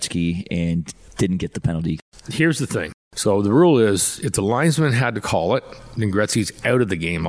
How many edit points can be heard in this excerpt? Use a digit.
3